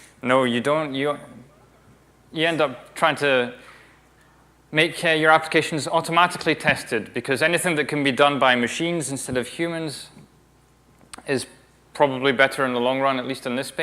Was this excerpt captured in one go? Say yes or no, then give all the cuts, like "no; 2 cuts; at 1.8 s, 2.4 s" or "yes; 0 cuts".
no; 1 cut; at 4.5 s